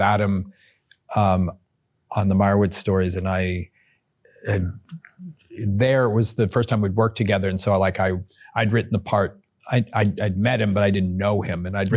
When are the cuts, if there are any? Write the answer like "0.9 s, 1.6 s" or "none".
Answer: none